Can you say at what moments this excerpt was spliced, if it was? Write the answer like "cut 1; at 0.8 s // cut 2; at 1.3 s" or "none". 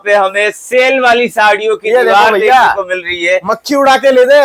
none

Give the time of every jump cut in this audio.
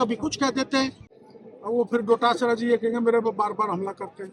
cut 1; at 1.1 s

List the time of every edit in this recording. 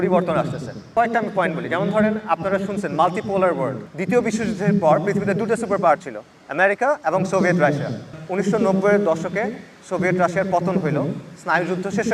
cut 1; at 0.9 s // cut 2; at 3.9 s // cut 3; at 8.2 s

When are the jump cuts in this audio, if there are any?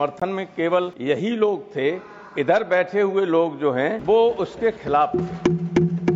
cut 1; at 0.9 s // cut 2; at 4.0 s

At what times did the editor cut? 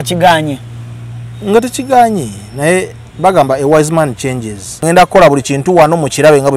cut 1; at 4.8 s

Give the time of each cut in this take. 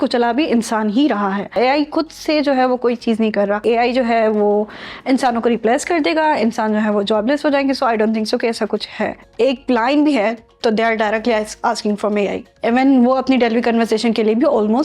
cut 1; at 1.6 s // cut 2; at 3.6 s // cut 3; at 9.2 s

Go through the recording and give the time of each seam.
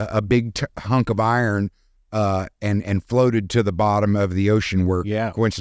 none

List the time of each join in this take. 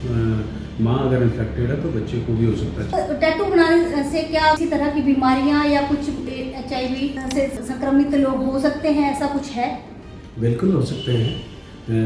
cut 1; at 2.9 s // cut 2; at 4.6 s // cut 3; at 7.7 s

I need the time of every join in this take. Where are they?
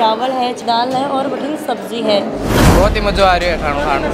cut 1; at 2.6 s

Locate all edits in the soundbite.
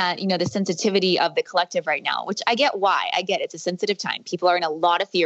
none

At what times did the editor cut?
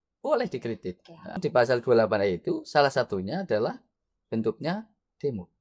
cut 1; at 1.4 s

